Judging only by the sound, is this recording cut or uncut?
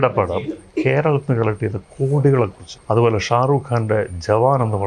cut